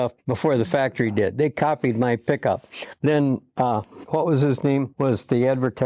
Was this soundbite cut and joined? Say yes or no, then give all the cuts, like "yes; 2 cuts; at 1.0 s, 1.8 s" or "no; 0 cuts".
yes; 2 cuts; at 3.9 s, 4.9 s